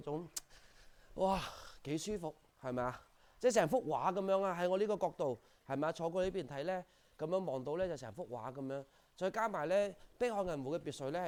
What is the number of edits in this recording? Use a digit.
0